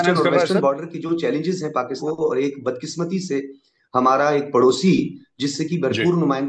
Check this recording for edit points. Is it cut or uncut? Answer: cut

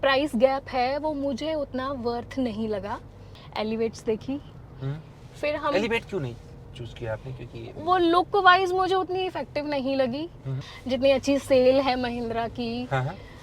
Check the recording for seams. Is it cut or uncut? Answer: cut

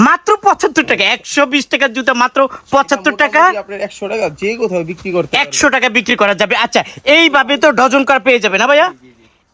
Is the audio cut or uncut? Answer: uncut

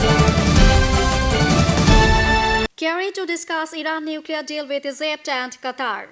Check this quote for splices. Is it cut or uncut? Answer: cut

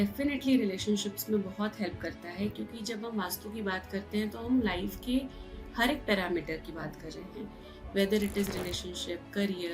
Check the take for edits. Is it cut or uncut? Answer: uncut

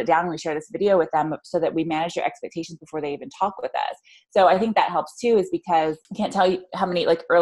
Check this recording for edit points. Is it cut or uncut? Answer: cut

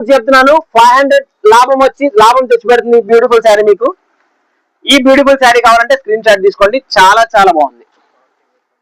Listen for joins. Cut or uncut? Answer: uncut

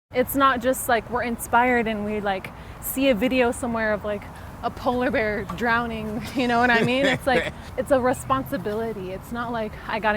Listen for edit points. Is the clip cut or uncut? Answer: cut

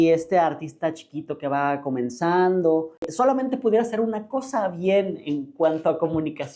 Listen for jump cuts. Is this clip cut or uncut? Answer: cut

